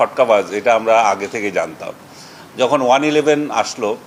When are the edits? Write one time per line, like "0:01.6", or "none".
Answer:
none